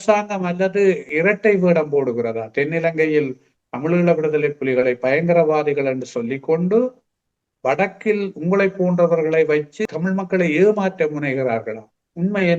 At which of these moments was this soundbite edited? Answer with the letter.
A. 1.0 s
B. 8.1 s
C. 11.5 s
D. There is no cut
A